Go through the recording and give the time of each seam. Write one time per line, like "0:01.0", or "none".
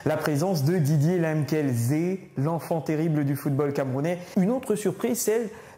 0:04.2